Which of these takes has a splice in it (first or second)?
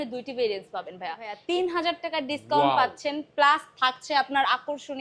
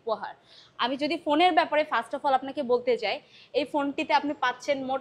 first